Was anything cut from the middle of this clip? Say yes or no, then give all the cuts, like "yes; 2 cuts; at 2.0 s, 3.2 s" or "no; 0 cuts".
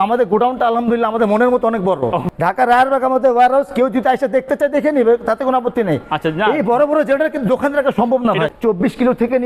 yes; 2 cuts; at 2.2 s, 8.5 s